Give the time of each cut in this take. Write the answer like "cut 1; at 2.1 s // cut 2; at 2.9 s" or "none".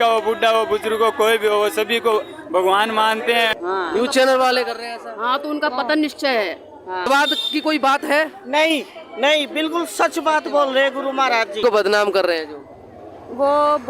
cut 1; at 3.6 s // cut 2; at 7.1 s // cut 3; at 11.6 s